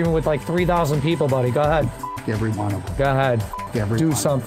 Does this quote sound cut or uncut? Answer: uncut